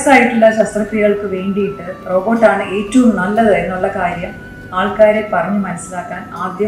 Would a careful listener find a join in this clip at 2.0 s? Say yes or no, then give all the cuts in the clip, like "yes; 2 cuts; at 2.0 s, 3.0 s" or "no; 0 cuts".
yes; 1 cut; at 2.0 s